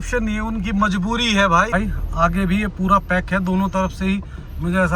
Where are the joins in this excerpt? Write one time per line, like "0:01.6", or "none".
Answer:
0:01.7

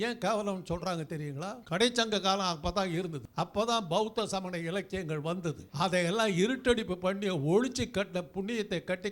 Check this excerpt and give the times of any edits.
0:01.6
0:03.2
0:05.7

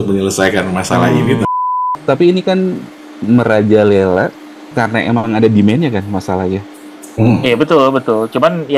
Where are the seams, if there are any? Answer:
0:01.4

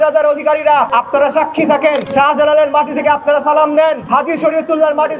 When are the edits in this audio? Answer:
0:00.9
0:02.1
0:04.0

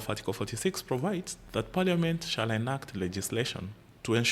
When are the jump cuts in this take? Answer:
0:01.4

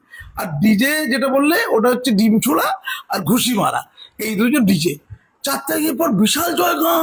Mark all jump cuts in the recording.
none

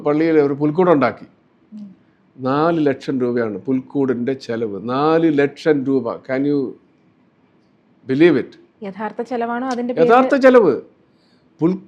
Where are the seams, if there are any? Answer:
none

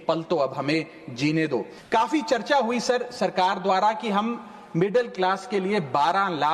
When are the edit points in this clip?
0:01.8

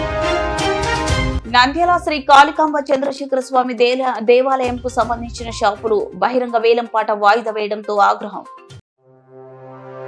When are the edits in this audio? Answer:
0:01.3

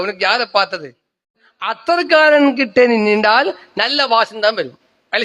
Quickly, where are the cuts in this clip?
0:01.4

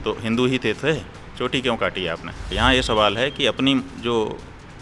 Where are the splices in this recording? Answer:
0:02.4

